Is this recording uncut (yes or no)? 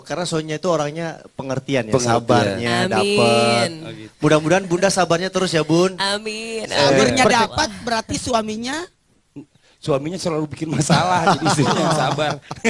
no